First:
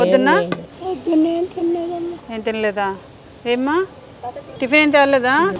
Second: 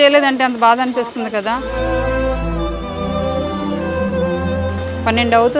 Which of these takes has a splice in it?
first; 1 cut; at 4.4 s

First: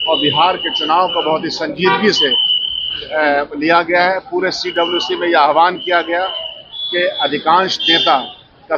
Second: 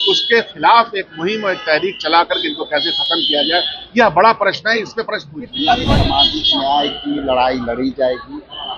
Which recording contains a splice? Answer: second; 1 cut; at 5.9 s

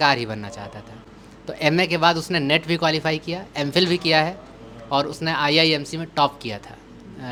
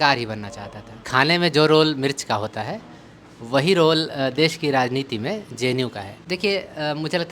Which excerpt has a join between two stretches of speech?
second; 2 cuts; at 1.1 s, 6.1 s

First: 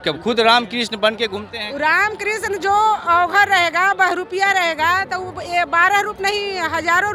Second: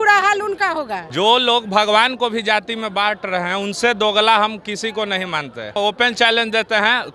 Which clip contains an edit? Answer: second; 2 cuts; at 1.0 s, 5.8 s

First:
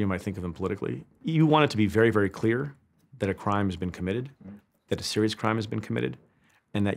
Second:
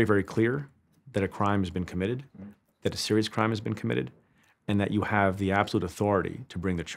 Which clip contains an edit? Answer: first; 1 cut; at 1.1 s

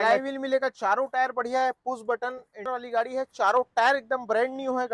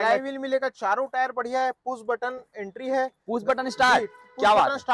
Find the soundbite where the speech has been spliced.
first; 1 cut; at 2.7 s

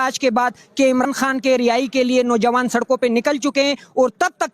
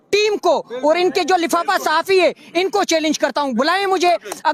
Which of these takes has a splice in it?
first; 1 cut; at 1.1 s

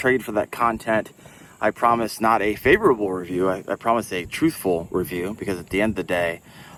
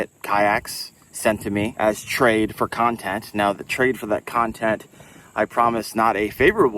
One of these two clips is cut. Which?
second; 1 cut; at 1.7 s

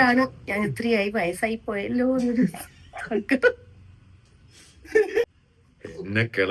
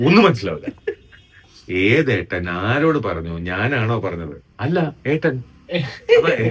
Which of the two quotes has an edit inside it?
first; 1 cut; at 5.3 s

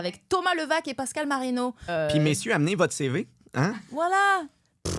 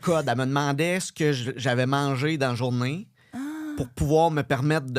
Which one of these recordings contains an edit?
first; 1 cut; at 1.8 s

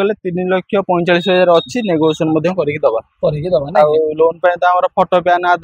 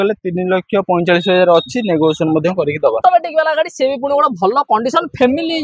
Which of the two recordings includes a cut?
second; 1 cut; at 3.0 s

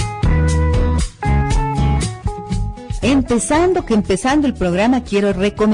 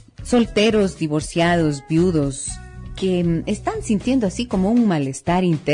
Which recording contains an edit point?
first; 1 cut; at 3.9 s

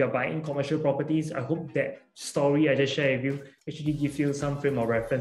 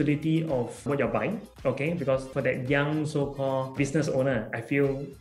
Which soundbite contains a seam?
second; 3 cuts; at 0.8 s, 2.3 s, 3.7 s

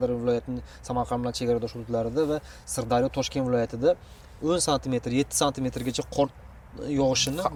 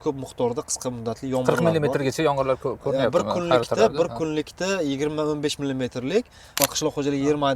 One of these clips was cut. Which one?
second; 1 cut; at 6.4 s

